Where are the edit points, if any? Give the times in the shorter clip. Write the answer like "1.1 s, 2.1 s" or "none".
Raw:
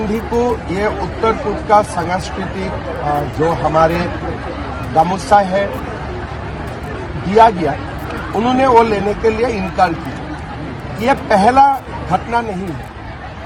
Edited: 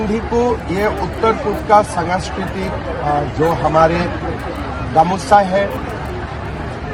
none

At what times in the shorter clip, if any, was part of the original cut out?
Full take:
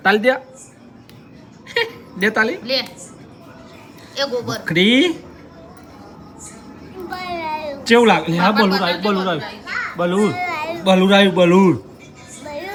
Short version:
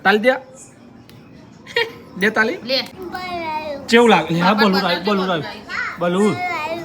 3.0 s

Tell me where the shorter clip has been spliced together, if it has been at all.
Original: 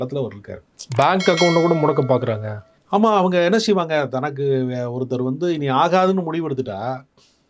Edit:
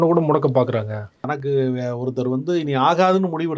1.2 s

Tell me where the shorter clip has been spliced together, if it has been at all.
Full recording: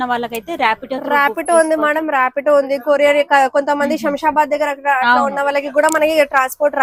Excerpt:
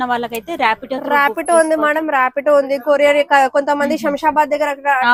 none

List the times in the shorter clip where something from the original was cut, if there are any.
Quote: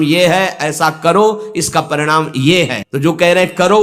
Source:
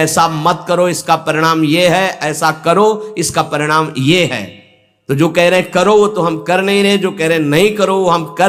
2.8 s

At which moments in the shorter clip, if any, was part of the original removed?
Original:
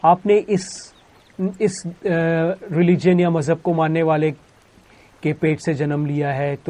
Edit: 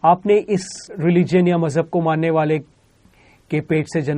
0.9 s

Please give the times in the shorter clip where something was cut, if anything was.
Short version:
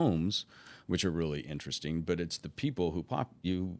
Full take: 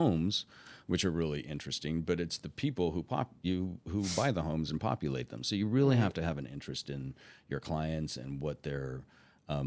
none

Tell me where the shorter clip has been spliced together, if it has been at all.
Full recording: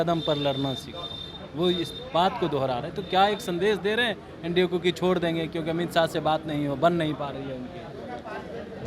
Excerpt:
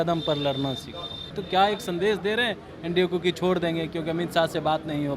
1.3 s

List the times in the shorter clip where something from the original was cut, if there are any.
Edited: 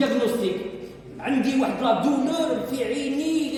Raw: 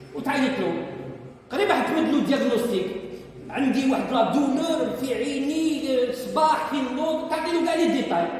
none

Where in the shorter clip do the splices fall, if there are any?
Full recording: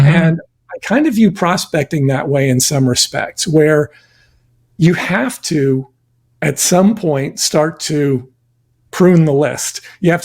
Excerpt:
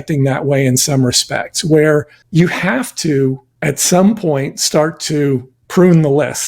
2.2 s, 3.5 s, 5.6 s

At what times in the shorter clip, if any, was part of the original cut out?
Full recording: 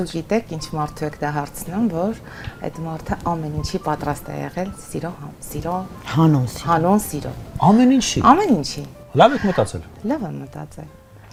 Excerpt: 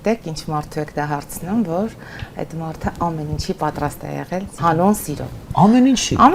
4.5 s

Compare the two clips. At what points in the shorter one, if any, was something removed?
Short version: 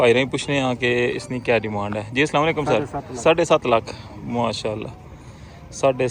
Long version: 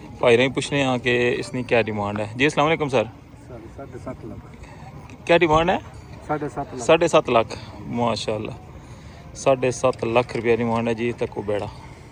3.0 s

